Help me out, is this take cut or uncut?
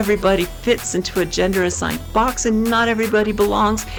uncut